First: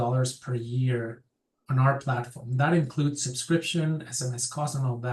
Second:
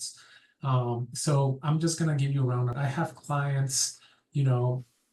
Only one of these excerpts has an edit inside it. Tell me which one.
second; 1 cut; at 2.7 s

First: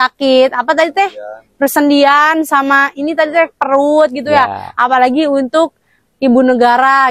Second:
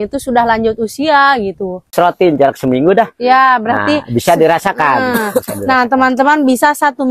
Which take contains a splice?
second; 1 cut; at 1.9 s

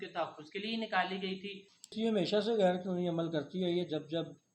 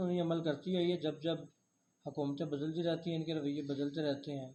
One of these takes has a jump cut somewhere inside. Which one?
first; 1 cut; at 1.9 s

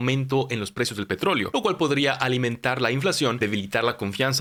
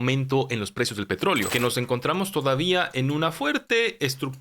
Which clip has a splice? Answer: second; 1 cut; at 1.5 s

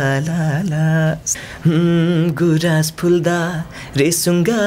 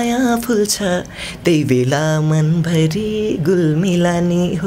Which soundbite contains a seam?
first; 1 cut; at 1.3 s

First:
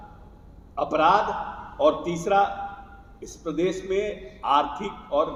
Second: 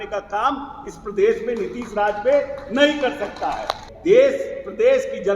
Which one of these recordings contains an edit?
second; 1 cut; at 3.8 s

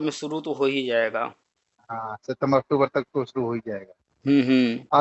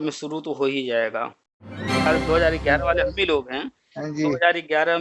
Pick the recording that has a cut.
second; 1 cut; at 2.0 s

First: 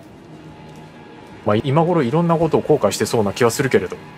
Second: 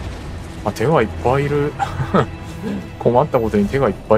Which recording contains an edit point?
first; 1 cut; at 1.6 s

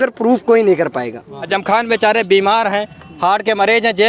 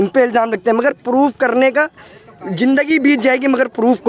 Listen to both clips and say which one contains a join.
first; 1 cut; at 1.5 s

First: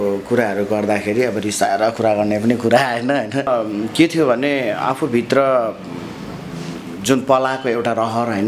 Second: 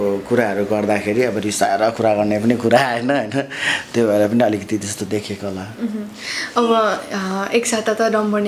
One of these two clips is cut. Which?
first; 1 cut; at 3.5 s

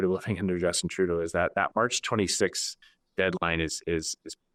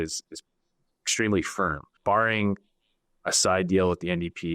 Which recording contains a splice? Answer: second; 1 cut; at 1.9 s

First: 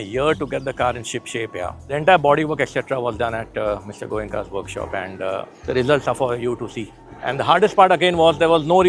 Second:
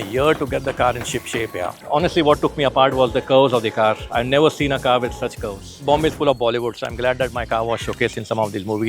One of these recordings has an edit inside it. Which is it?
second; 2 cuts; at 1.8 s, 5.7 s

